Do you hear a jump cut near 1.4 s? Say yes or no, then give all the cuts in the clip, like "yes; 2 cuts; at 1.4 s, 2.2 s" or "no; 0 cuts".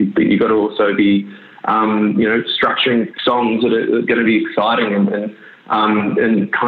no; 1 cut; at 3.1 s